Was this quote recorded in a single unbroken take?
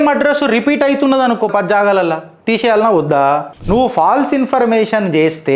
no; 1 cut; at 3.5 s

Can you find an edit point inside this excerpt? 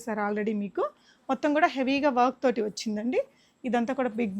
no; 0 cuts

